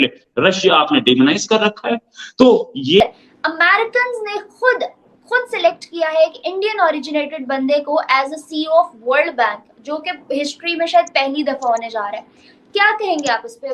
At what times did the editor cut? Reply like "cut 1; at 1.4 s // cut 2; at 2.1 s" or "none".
cut 1; at 3.0 s